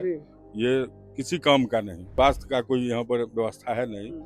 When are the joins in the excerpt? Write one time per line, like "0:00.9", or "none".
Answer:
0:02.0